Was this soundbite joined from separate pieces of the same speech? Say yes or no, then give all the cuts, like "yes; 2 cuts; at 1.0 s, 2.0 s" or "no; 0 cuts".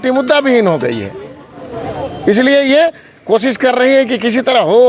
no; 0 cuts